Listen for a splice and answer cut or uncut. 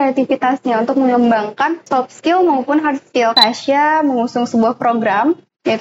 cut